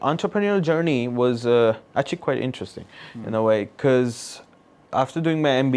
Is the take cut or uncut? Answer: uncut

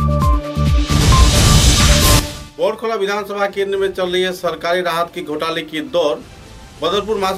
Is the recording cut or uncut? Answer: cut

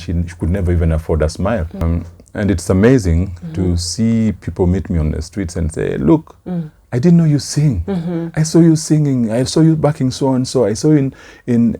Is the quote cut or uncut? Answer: cut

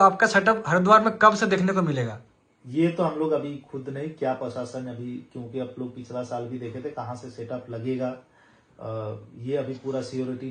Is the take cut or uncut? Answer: uncut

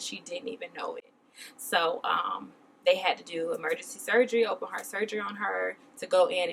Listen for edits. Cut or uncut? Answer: uncut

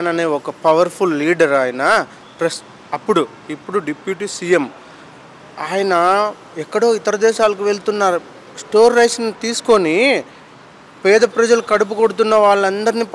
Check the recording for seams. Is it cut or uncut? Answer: uncut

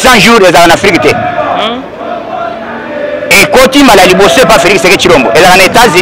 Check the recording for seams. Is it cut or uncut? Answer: uncut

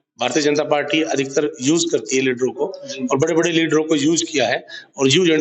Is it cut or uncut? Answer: uncut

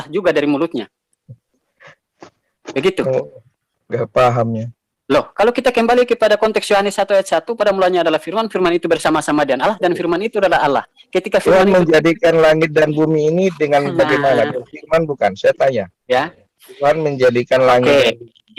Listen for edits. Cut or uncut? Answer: uncut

